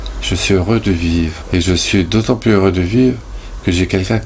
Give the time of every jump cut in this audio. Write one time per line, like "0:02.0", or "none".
0:01.4